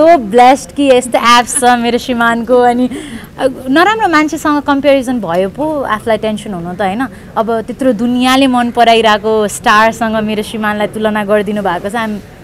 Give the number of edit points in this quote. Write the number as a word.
zero